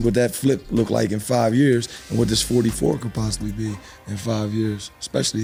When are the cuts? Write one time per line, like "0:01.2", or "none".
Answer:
none